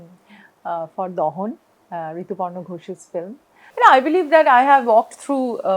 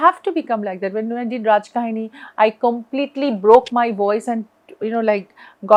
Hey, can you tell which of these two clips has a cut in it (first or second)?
first